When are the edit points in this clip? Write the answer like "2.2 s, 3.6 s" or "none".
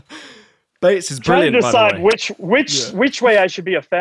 none